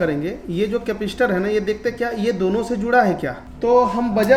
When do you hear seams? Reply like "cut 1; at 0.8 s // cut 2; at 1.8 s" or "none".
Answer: none